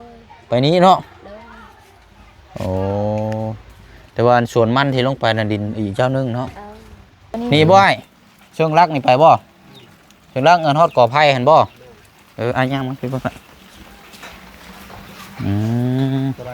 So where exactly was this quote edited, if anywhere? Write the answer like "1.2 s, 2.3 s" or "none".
7.4 s